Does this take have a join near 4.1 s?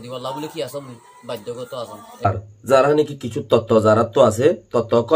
no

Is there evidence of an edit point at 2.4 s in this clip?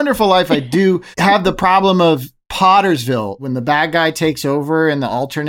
yes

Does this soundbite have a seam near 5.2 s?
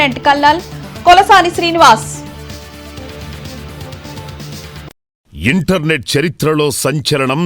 yes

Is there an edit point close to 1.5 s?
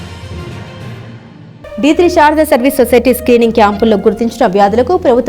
yes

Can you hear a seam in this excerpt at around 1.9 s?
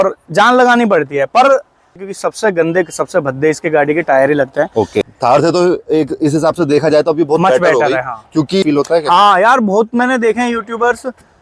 yes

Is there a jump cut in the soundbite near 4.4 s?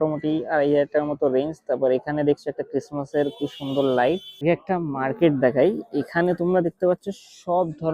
yes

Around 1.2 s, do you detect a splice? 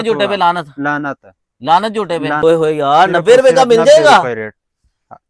no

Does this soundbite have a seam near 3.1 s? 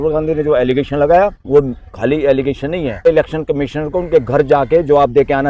yes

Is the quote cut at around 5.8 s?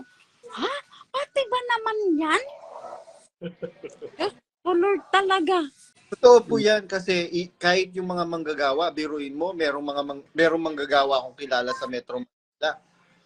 yes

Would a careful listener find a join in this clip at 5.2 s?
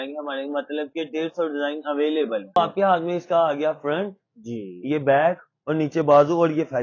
no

